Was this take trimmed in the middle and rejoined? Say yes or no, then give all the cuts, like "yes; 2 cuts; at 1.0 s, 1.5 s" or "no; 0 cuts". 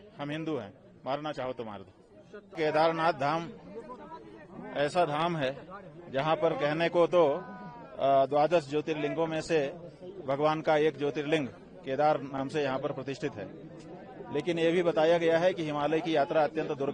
yes; 1 cut; at 2.4 s